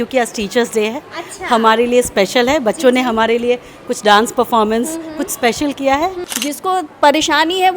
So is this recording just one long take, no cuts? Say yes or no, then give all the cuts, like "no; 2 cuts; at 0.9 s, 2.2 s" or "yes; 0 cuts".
no; 1 cut; at 6.3 s